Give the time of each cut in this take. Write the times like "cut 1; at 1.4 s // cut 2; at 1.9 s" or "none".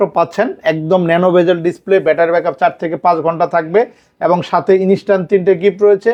none